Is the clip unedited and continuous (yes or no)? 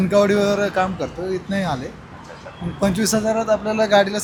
yes